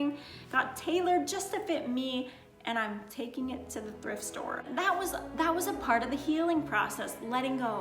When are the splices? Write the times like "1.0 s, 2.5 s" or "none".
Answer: 4.6 s